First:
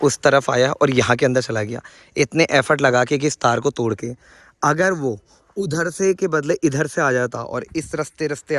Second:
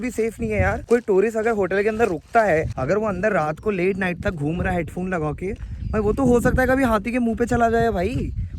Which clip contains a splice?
second; 2 cuts; at 0.8 s, 2.7 s

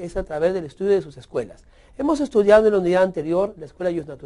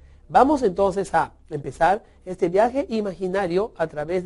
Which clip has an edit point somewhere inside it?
second; 1 cut; at 2.5 s

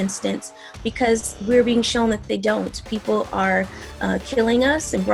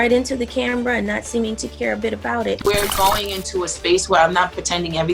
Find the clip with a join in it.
second; 1 cut; at 2.6 s

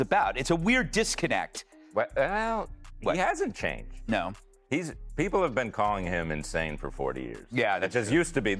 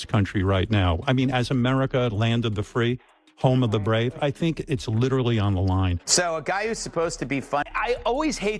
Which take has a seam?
second; 1 cut; at 7.7 s

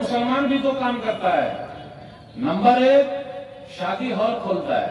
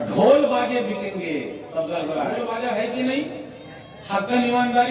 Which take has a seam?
second; 1 cut; at 2.4 s

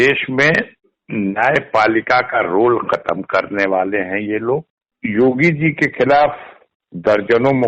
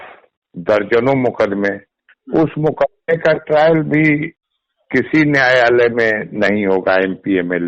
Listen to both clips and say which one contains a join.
first; 1 cut; at 4.8 s

